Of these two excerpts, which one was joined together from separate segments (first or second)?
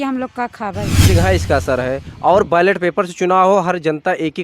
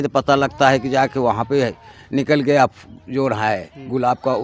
first